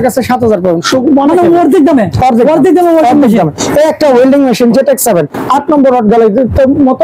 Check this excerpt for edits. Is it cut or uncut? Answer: uncut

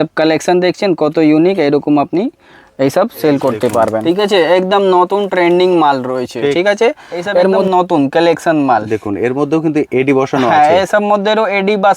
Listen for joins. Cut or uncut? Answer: cut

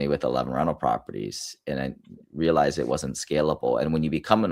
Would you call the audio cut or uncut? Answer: uncut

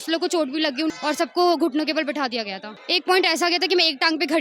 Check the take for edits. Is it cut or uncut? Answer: cut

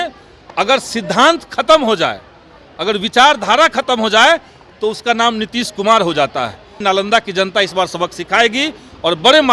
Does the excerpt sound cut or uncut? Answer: cut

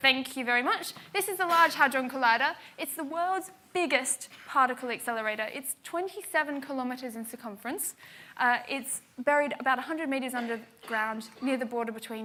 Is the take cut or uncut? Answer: uncut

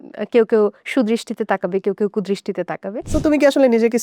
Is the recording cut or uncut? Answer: cut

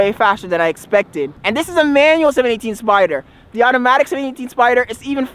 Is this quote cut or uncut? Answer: cut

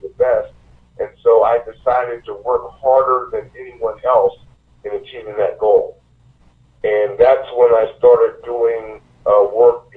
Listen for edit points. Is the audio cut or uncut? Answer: uncut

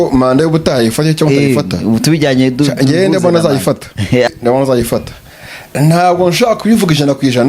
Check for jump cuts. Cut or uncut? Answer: cut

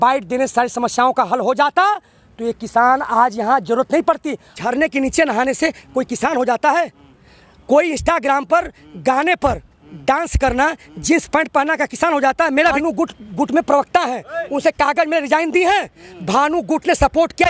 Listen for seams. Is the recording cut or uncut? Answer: cut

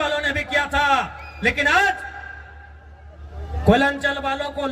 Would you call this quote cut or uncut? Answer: uncut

